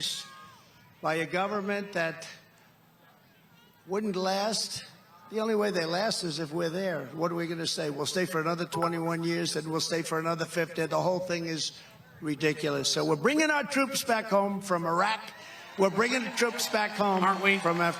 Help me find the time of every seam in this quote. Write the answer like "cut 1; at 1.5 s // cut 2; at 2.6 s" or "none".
none